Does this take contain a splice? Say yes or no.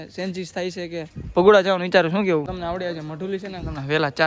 yes